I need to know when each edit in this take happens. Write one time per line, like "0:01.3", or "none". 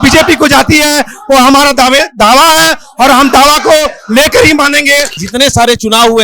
0:05.2